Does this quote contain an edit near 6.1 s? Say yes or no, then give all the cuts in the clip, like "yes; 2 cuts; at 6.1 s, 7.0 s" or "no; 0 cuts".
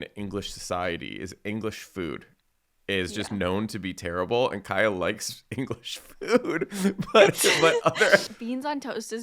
no; 1 cut; at 8.3 s